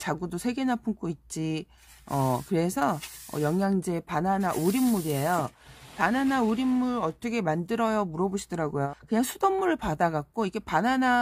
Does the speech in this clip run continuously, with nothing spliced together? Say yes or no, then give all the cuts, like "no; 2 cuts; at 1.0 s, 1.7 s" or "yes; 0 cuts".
yes; 0 cuts